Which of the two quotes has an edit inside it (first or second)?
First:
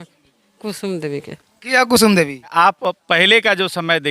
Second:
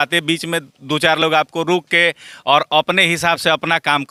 first